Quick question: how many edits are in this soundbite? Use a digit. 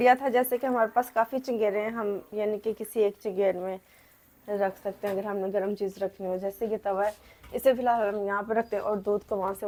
0